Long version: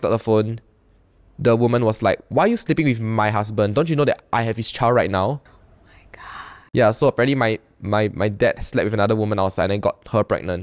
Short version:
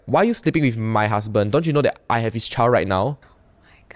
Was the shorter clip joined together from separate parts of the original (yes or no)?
no